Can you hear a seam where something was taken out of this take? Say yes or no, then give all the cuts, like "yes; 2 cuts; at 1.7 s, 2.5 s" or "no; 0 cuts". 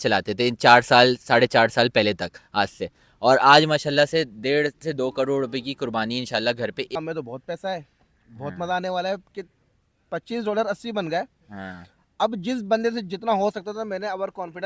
yes; 1 cut; at 7.0 s